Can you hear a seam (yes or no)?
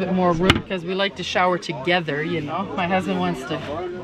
yes